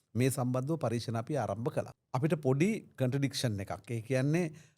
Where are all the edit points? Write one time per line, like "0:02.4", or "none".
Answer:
0:02.0